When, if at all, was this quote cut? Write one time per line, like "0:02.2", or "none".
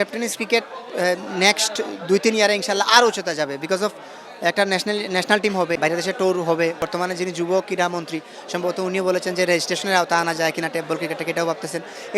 0:05.8
0:06.8